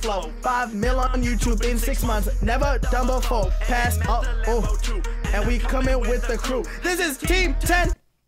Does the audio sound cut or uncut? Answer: uncut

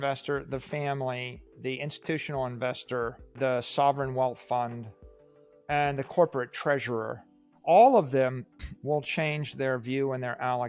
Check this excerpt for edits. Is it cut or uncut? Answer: cut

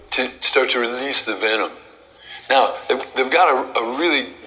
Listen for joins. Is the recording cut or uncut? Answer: uncut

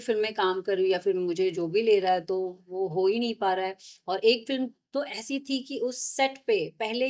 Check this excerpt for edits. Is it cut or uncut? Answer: uncut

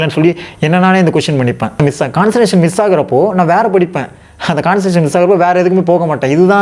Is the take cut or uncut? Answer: cut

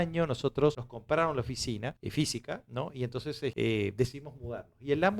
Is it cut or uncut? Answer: cut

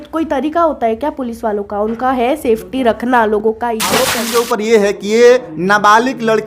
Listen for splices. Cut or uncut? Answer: cut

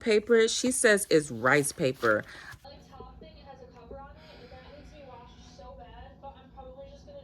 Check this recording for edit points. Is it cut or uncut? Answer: cut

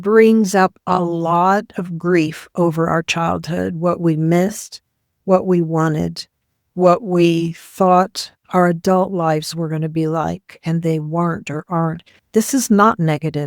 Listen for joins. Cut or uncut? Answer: cut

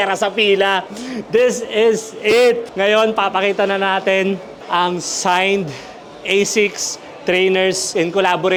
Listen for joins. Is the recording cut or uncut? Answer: uncut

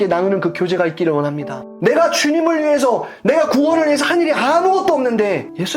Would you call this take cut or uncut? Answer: cut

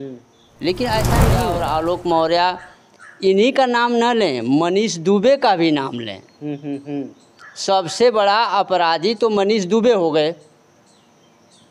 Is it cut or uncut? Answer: cut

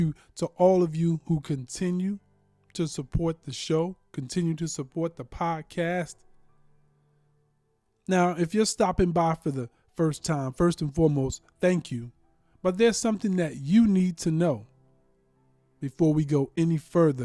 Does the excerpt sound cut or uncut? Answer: uncut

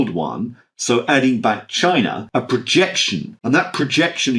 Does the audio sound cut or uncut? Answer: cut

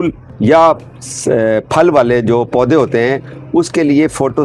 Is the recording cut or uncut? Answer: uncut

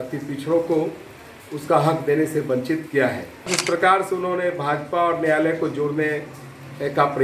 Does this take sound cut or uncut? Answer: cut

